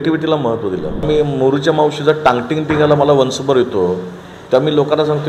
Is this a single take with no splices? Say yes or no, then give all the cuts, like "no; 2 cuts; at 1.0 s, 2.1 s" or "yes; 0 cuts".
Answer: no; 1 cut; at 1.1 s